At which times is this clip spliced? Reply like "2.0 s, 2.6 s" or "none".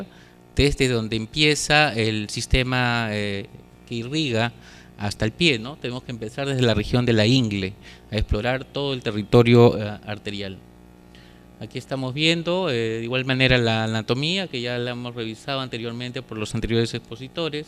15.5 s